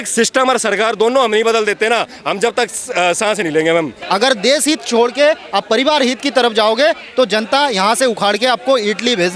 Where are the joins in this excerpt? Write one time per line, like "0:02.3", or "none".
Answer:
0:04.0